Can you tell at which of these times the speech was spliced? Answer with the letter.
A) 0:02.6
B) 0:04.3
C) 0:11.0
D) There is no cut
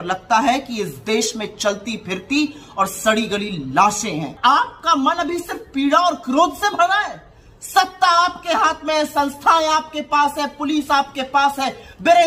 B